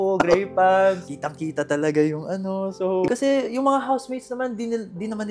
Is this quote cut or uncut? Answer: cut